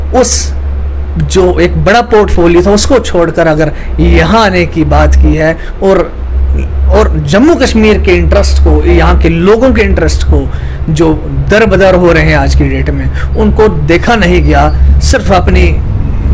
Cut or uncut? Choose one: uncut